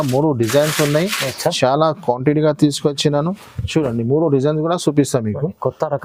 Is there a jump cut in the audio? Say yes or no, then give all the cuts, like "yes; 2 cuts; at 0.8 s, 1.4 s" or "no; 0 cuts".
no; 0 cuts